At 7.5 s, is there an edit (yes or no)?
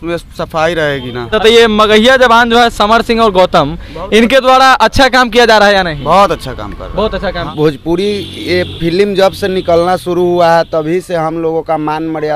yes